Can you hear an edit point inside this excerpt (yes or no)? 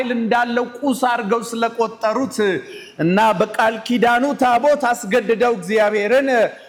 no